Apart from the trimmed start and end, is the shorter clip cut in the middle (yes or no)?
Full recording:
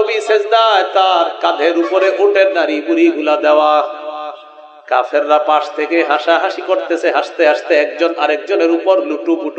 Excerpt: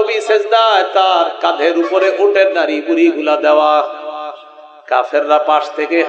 no